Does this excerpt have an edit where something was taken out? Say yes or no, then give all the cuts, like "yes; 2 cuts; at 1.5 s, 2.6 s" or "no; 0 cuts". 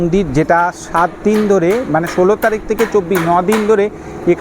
no; 0 cuts